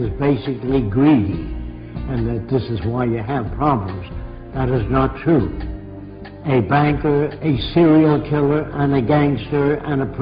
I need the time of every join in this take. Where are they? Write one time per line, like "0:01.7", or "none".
0:08.7